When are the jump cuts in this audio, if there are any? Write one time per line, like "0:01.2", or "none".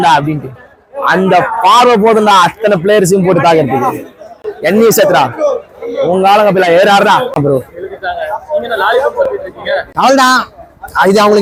none